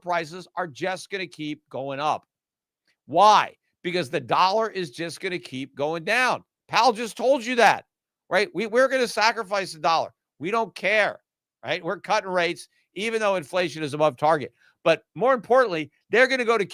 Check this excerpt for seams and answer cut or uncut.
uncut